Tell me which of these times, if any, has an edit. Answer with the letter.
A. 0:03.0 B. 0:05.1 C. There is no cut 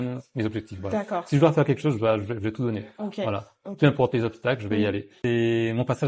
B